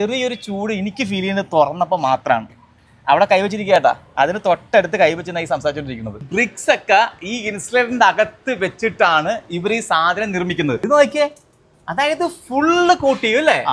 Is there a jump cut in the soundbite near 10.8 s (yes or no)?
yes